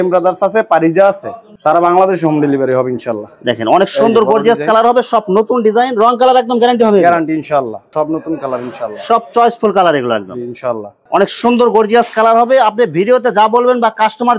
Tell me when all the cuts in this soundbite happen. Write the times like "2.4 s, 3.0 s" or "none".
1.5 s, 7.9 s, 11.0 s